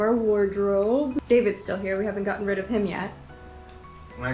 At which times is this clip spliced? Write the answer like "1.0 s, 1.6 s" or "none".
1.2 s

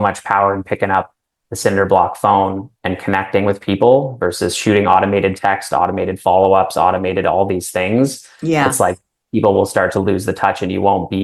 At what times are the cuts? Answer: none

